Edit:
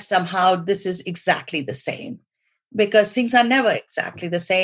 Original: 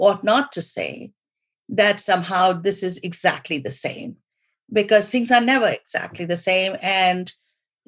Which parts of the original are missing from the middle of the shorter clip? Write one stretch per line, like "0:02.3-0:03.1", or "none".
none